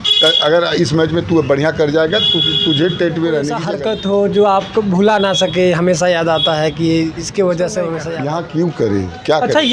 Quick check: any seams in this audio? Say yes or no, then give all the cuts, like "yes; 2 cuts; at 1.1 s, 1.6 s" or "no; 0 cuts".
yes; 2 cuts; at 3.6 s, 8.1 s